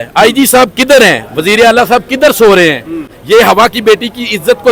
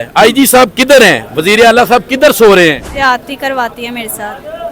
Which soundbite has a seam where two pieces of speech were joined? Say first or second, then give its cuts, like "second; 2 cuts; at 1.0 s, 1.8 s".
second; 1 cut; at 2.9 s